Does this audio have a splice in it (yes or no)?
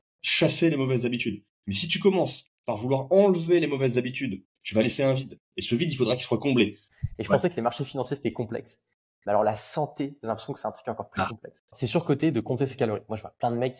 yes